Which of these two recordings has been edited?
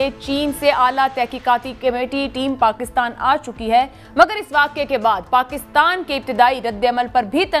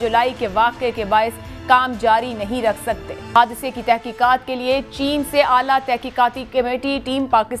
second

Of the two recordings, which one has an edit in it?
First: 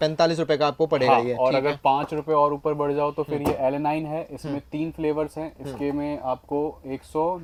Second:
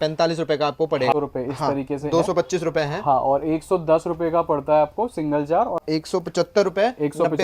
second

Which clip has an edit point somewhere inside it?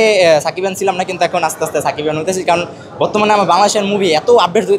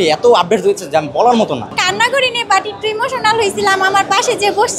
second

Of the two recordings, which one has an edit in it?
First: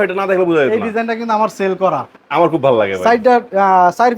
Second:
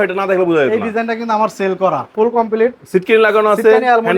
second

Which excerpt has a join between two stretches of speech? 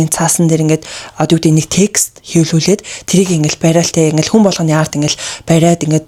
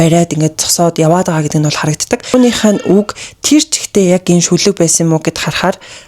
second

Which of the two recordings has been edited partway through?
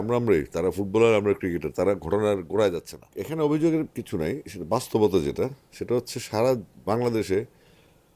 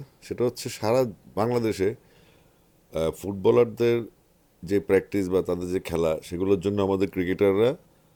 first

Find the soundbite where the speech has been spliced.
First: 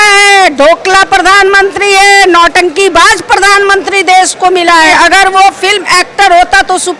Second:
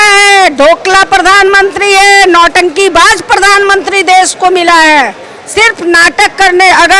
first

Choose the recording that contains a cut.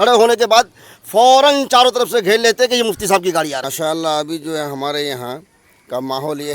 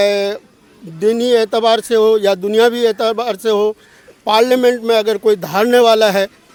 first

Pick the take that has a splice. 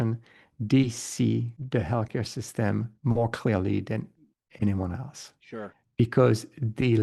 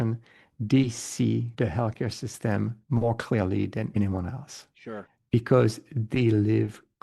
second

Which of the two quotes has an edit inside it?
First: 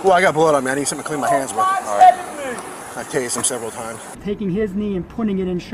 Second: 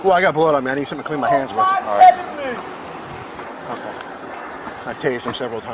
first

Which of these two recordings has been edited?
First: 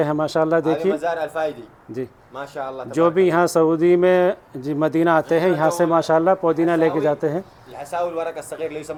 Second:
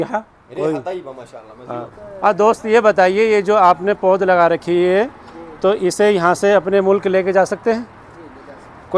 second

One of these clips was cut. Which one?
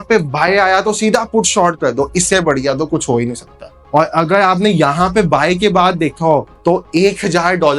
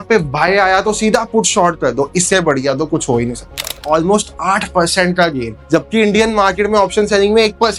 second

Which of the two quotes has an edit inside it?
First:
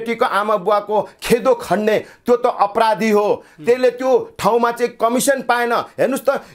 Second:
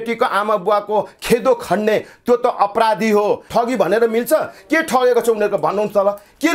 second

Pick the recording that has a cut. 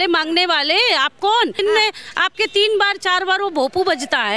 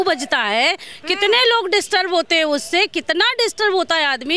first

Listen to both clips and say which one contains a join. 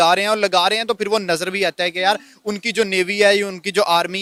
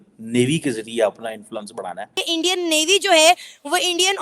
second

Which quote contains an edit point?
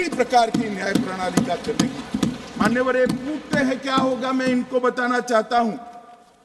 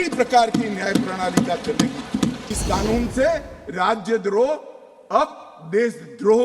second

